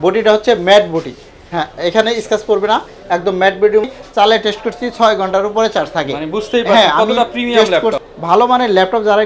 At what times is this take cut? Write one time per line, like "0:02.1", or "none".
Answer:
0:03.9
0:08.1